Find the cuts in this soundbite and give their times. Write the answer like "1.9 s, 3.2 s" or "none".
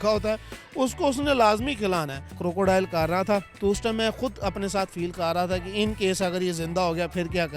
2.3 s, 3.5 s